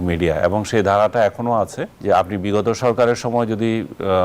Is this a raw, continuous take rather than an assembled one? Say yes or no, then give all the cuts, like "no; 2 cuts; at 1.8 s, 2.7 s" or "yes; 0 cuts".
no; 1 cut; at 1.9 s